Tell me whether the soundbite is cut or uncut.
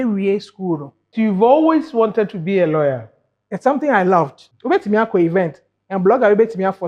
cut